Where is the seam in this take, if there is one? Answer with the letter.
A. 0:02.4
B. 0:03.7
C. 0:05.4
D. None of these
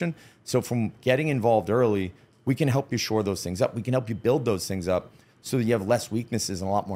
D